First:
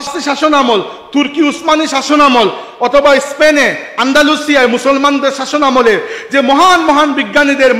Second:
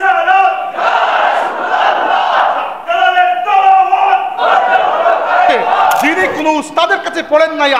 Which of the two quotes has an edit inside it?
second; 1 cut; at 6.2 s

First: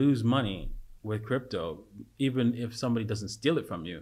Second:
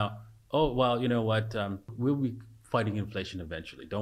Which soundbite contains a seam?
second; 1 cut; at 1.9 s

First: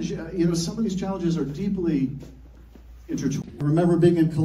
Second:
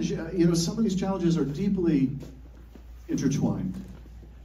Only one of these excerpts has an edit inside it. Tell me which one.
second; 1 cut; at 3.4 s

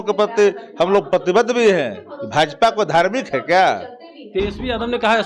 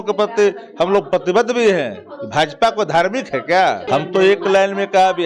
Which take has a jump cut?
second; 1 cut; at 3.8 s

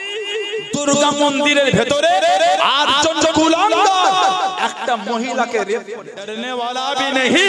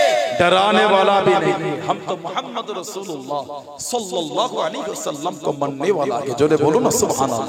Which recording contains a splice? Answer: first; 1 cut; at 6.4 s

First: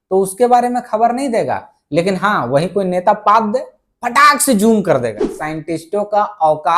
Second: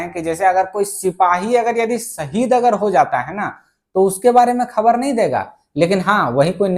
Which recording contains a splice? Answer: first; 1 cut; at 5.3 s

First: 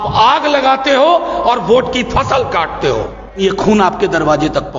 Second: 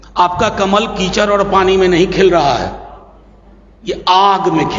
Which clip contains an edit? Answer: first; 1 cut; at 3.4 s

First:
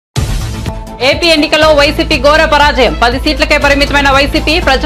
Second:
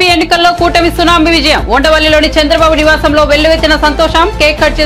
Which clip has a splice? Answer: first; 1 cut; at 1.0 s

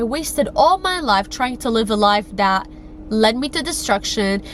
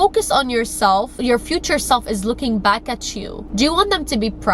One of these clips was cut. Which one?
second; 1 cut; at 1.1 s

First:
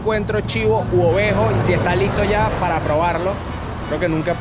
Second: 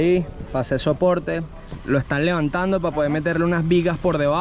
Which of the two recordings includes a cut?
second; 1 cut; at 1.7 s

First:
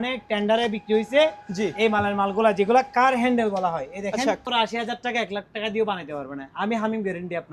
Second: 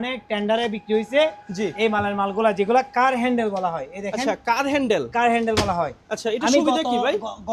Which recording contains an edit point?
first; 1 cut; at 4.4 s

